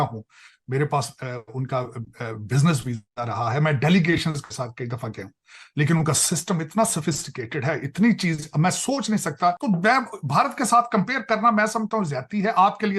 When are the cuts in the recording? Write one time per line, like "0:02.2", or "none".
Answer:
0:09.6